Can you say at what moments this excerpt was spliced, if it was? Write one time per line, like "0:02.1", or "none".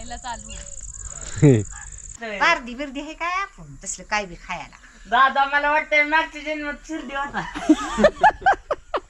0:02.2